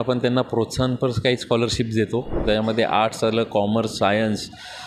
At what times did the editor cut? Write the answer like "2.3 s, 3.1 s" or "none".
2.4 s